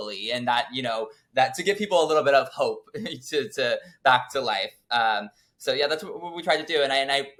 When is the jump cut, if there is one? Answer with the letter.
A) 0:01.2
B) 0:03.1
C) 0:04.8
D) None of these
D